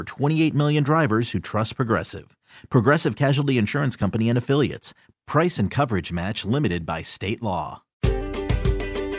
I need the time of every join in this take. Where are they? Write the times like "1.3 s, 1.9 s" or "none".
8.0 s